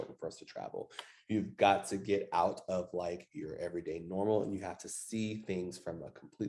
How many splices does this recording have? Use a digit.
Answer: 0